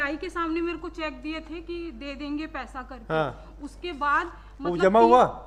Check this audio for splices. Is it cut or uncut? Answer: uncut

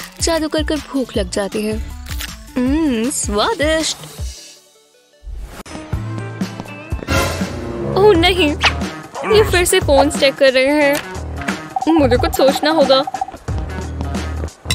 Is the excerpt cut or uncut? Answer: cut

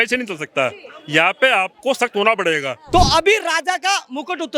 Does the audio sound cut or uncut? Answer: cut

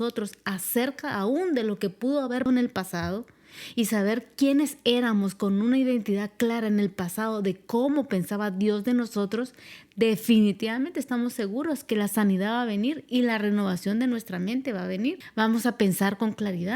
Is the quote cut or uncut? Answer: cut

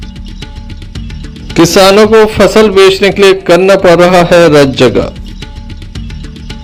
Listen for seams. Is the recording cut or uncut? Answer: uncut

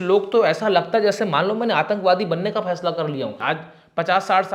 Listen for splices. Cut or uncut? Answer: cut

